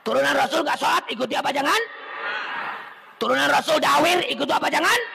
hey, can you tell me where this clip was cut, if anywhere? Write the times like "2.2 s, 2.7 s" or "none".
none